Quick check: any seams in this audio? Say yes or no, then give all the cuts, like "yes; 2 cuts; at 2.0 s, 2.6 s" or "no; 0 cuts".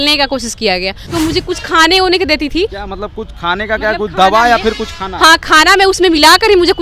yes; 1 cut; at 1.1 s